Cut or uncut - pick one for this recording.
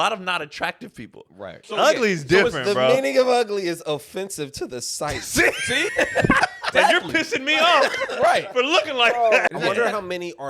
cut